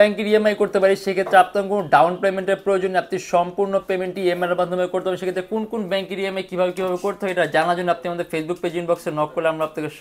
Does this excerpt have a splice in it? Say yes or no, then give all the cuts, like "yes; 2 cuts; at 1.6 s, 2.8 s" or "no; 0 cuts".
no; 0 cuts